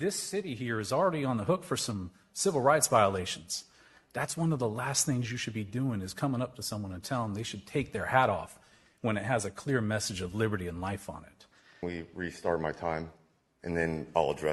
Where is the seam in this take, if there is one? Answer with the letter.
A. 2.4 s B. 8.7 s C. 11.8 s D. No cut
C